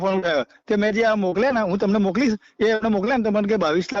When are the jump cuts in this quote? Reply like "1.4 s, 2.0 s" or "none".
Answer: none